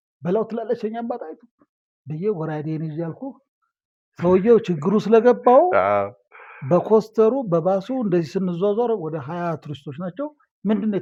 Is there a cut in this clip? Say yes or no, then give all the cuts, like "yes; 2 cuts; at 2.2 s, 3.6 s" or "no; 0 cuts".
no; 0 cuts